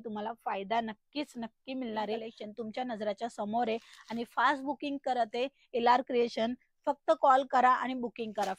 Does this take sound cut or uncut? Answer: cut